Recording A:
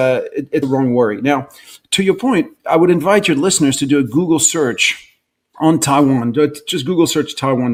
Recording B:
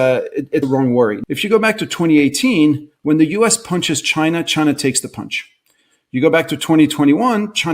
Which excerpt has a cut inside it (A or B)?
B